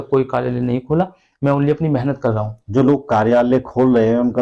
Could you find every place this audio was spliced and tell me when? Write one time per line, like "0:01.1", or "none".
none